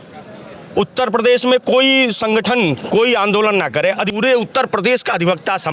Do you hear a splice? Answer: yes; 1 cut; at 4.1 s

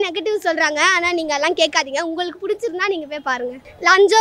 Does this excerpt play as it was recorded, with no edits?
yes; 0 cuts

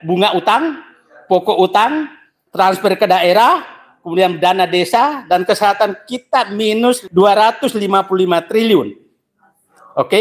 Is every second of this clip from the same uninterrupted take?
no; 1 cut; at 7.0 s

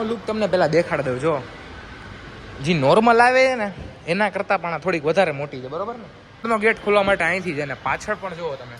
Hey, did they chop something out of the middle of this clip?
yes; 1 cut; at 6.5 s

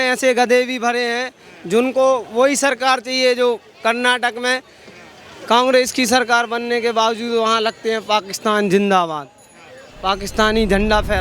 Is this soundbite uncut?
yes; 0 cuts

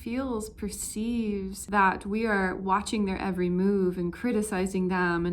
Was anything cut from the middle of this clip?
yes; 1 cut; at 1.6 s

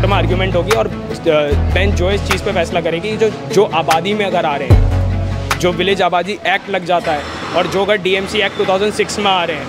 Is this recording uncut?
yes; 0 cuts

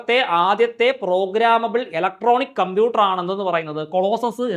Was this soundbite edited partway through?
no; 0 cuts

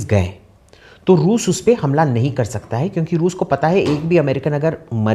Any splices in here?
no; 0 cuts

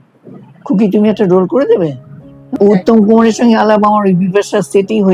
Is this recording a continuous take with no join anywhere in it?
no; 1 cut; at 2.5 s

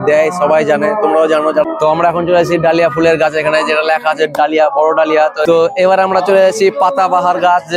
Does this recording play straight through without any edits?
no; 2 cuts; at 1.6 s, 5.4 s

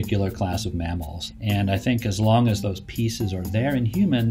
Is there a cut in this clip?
yes; 1 cut; at 1.2 s

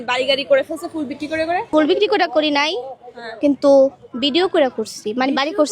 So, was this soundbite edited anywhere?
yes; 1 cut; at 1.7 s

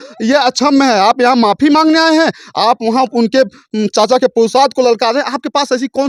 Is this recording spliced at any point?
no; 0 cuts

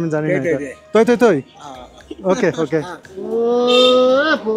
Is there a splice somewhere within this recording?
yes; 1 cut; at 3.1 s

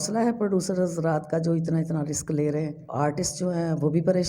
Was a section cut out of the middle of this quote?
yes; 1 cut; at 2.8 s

